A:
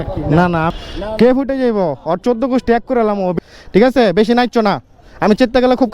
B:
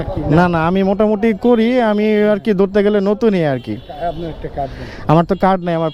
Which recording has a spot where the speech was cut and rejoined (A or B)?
A